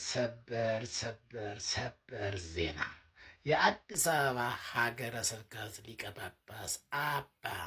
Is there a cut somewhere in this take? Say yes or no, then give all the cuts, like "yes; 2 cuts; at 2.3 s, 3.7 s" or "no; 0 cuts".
no; 0 cuts